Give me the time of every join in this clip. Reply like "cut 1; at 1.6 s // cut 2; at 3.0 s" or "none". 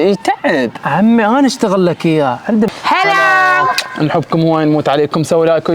cut 1; at 2.7 s